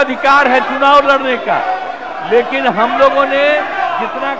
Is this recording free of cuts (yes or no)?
yes